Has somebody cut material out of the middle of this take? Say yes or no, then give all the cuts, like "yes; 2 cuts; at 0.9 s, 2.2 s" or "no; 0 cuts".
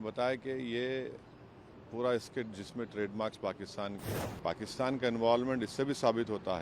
yes; 1 cut; at 4.1 s